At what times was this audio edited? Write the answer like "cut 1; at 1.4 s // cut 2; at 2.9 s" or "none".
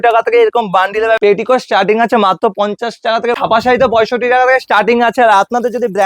cut 1; at 1.2 s // cut 2; at 3.4 s